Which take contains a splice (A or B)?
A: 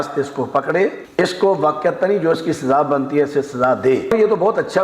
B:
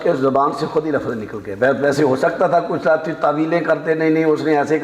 A